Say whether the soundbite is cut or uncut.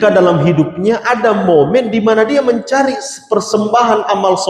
uncut